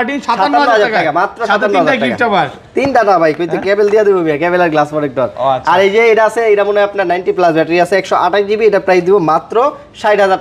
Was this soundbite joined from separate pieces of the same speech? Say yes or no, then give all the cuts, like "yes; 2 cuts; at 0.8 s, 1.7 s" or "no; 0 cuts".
no; 0 cuts